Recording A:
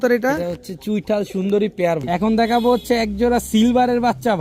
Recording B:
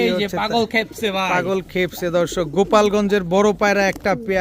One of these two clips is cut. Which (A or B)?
A